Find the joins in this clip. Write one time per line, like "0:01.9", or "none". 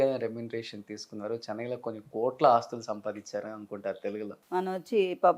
0:04.3